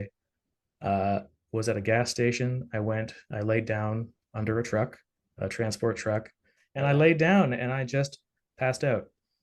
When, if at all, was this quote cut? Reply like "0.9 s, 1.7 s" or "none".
1.4 s, 6.7 s